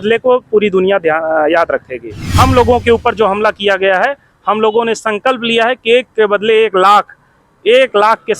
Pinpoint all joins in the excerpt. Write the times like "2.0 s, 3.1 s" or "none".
2.2 s